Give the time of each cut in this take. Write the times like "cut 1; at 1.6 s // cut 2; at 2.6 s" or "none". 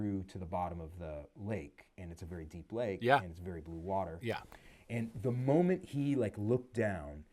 none